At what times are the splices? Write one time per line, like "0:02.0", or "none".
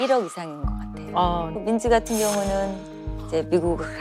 0:01.5